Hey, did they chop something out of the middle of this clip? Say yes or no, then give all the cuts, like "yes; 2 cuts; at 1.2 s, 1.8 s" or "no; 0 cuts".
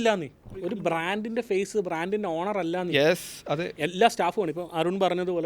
yes; 1 cut; at 0.9 s